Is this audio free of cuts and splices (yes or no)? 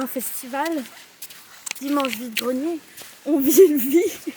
yes